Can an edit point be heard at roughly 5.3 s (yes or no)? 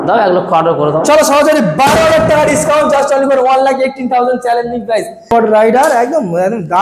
yes